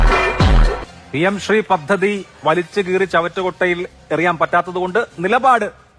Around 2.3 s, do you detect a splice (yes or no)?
no